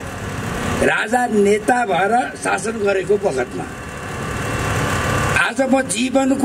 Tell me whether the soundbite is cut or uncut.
uncut